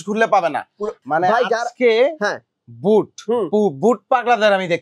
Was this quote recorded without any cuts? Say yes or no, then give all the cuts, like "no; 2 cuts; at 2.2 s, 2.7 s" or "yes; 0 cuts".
no; 1 cut; at 1.0 s